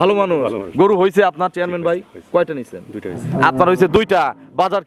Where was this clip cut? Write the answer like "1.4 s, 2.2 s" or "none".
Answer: none